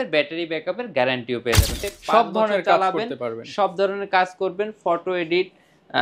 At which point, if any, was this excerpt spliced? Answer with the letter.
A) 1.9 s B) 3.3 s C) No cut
A